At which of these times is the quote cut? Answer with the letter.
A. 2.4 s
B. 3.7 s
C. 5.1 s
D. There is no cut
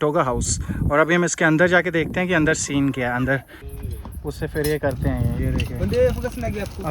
B